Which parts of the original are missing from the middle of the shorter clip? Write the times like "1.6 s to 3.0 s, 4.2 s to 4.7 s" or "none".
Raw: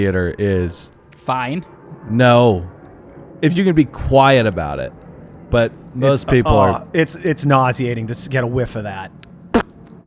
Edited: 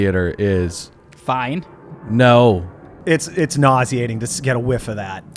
3.0 s to 6.8 s